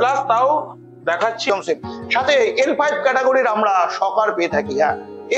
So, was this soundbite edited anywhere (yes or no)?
yes